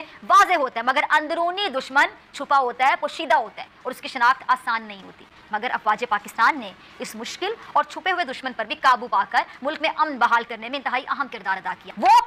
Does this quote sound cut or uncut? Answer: uncut